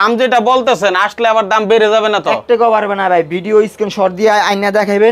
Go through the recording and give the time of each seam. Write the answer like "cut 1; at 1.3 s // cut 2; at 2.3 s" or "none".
none

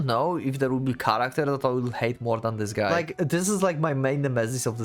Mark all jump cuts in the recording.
cut 1; at 2.9 s

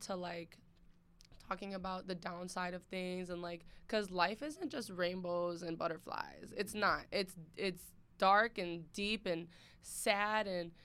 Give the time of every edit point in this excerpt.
none

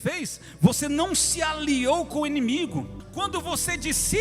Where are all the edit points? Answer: cut 1; at 3.0 s

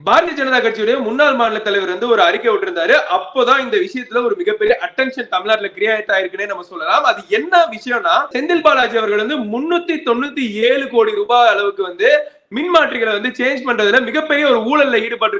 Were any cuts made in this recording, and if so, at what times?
cut 1; at 8.3 s

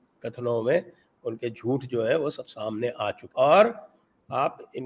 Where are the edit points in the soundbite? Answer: cut 1; at 3.2 s

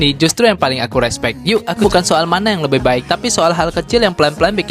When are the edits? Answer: cut 1; at 1.8 s

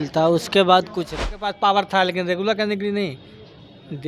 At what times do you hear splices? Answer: cut 1; at 1.4 s

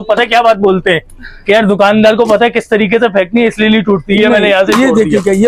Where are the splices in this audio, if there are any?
none

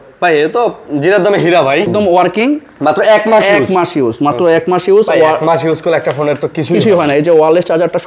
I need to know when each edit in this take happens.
cut 1; at 1.9 s

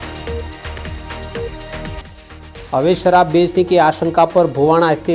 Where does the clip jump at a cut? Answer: cut 1; at 2.0 s

